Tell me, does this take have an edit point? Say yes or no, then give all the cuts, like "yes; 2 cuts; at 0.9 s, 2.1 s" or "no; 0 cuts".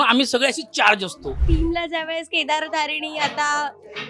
yes; 1 cut; at 1.4 s